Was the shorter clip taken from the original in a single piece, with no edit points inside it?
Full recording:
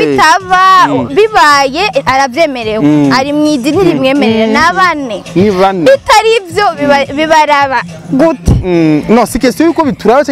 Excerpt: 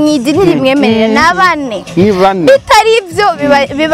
yes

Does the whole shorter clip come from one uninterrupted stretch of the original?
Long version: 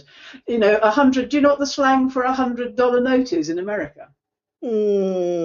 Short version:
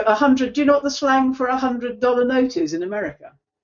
yes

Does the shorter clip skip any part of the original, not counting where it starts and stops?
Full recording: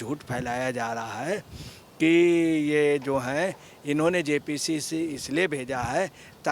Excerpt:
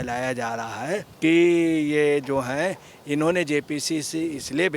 yes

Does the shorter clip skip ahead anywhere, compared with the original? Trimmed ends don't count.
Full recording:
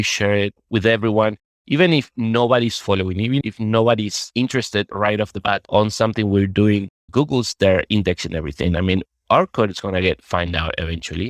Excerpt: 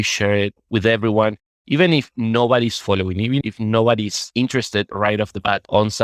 no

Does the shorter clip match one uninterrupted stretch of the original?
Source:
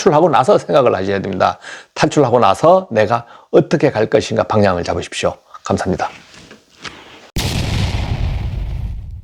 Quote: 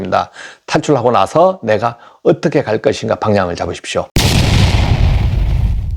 no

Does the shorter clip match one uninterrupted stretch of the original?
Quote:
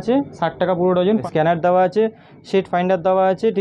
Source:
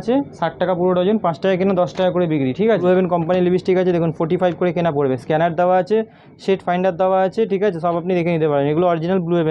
no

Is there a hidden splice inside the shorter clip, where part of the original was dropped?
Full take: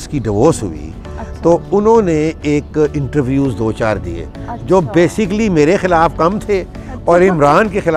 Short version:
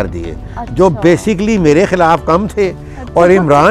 no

